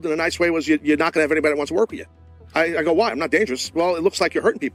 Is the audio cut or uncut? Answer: uncut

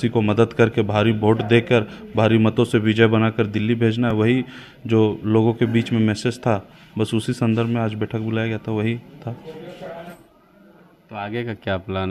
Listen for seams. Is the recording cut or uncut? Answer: uncut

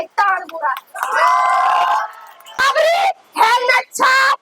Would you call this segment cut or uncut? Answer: cut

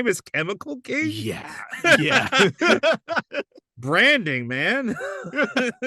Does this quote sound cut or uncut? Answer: uncut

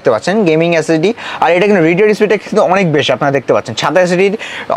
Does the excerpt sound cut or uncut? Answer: uncut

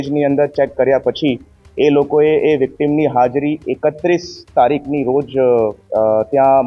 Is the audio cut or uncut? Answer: uncut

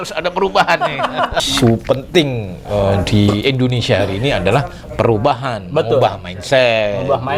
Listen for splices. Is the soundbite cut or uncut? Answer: cut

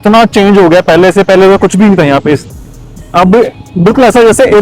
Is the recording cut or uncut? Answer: uncut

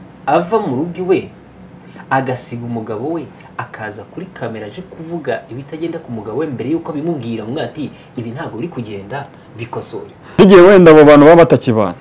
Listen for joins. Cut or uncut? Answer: cut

